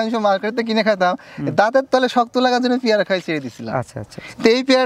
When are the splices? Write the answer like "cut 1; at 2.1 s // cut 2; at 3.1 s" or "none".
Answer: none

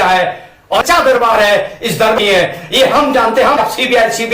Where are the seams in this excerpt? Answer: cut 1; at 0.8 s // cut 2; at 2.2 s // cut 3; at 3.6 s

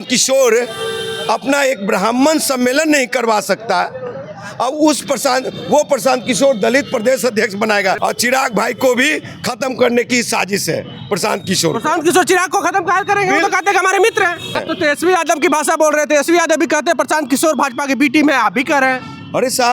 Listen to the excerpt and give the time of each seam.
cut 1; at 8.0 s // cut 2; at 14.6 s

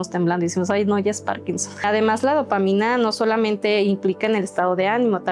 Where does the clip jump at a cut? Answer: cut 1; at 1.8 s

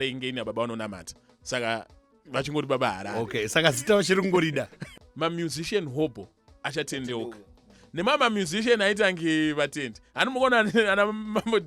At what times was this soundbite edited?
cut 1; at 4.8 s

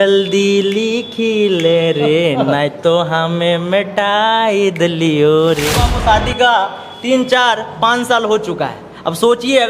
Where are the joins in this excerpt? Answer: cut 1; at 5.9 s

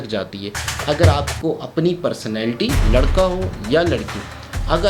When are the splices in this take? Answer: none

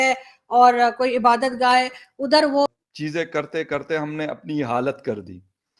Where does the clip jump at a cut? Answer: cut 1; at 2.8 s

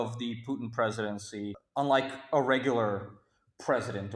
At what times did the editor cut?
cut 1; at 1.6 s

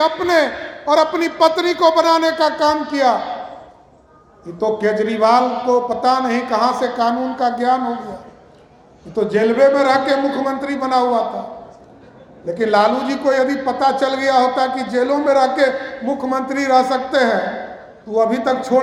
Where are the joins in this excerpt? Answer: none

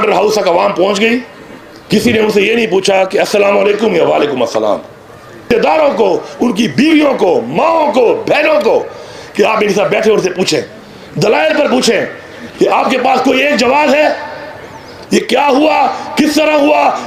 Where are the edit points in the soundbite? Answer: cut 1; at 5.5 s

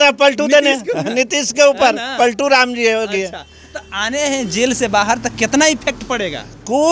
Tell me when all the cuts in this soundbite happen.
none

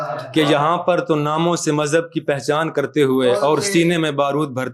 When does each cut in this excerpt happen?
none

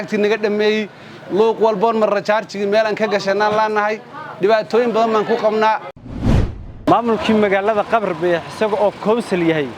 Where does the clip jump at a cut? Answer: cut 1; at 6.2 s

